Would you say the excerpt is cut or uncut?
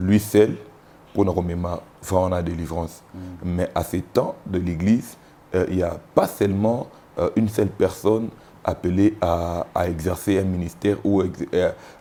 uncut